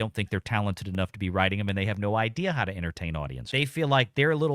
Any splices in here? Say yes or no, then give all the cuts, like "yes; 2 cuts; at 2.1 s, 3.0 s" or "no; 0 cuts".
yes; 1 cut; at 3.5 s